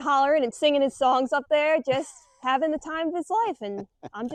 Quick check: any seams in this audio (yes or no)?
no